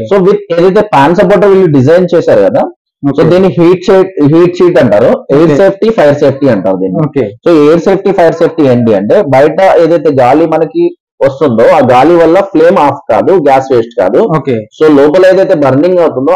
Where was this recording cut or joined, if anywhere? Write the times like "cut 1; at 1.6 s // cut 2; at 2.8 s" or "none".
none